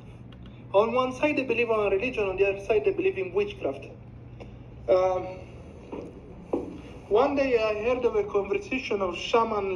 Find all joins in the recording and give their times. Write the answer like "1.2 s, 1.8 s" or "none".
none